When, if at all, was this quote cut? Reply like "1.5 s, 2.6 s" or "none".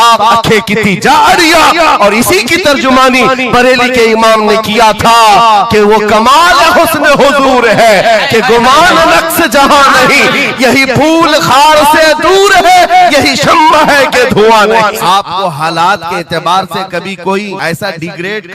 15.0 s, 17.6 s